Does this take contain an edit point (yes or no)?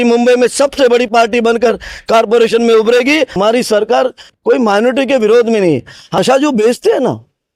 yes